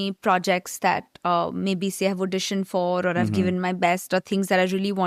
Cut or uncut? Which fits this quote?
uncut